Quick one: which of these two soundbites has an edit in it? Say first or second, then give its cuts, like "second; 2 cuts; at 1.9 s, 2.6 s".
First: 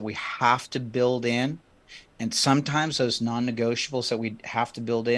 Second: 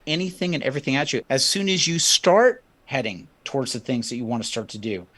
second; 1 cut; at 1.2 s